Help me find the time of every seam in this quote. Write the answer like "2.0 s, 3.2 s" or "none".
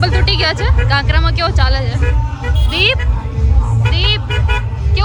none